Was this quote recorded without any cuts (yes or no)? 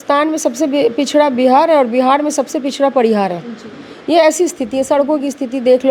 yes